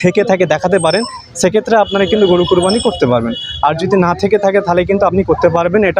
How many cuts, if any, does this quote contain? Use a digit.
0